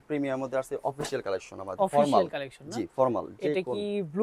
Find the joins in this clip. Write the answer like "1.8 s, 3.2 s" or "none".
none